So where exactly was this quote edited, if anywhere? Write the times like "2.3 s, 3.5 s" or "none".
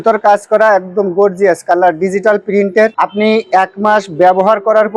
none